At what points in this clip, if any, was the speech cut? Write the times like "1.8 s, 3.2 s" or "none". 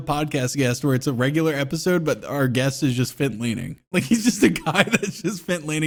none